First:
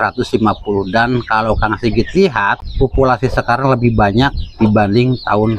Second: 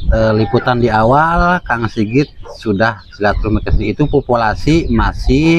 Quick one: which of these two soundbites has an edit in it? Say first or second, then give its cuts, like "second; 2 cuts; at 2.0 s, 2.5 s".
first; 1 cut; at 2.6 s